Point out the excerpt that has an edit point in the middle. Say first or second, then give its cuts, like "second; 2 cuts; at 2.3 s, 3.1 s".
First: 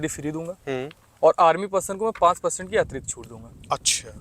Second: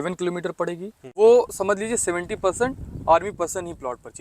second; 1 cut; at 1.1 s